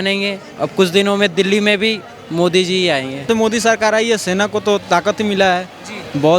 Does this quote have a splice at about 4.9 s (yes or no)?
no